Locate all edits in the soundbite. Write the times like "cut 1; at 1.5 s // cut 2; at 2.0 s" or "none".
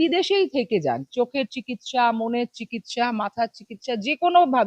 none

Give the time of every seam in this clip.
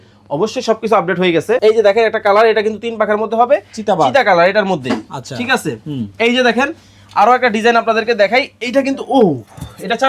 cut 1; at 1.6 s

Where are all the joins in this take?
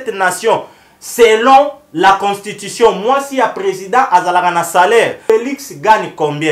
cut 1; at 5.2 s

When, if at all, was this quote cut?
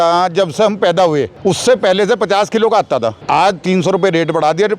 cut 1; at 1.3 s // cut 2; at 3.2 s

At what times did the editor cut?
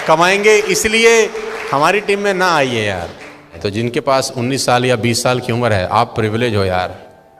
cut 1; at 3.6 s

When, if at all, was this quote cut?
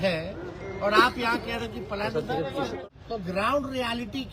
cut 1; at 2.8 s

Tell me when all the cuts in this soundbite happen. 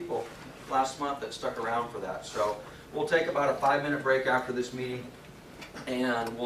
none

